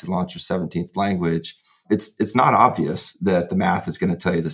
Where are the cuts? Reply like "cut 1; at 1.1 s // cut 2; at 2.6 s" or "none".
none